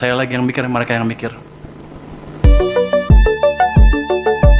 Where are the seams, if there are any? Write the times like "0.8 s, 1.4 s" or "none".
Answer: 2.4 s